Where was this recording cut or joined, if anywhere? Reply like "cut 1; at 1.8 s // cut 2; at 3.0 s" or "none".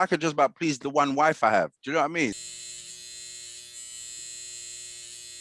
cut 1; at 2.5 s